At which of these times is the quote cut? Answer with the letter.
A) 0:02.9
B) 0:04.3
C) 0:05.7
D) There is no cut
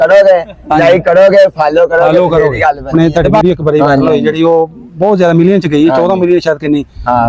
A